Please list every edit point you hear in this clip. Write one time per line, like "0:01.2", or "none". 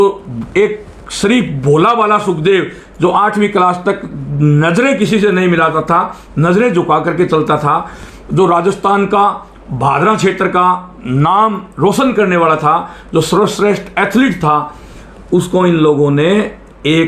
none